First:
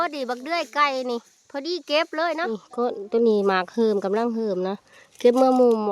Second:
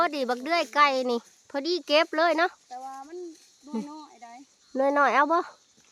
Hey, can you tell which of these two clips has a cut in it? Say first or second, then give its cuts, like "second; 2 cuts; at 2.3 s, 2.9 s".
first; 1 cut; at 2.5 s